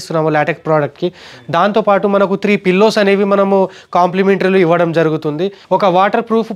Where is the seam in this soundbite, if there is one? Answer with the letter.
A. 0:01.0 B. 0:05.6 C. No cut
B